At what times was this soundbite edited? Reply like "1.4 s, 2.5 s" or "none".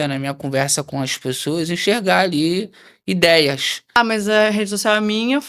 4.0 s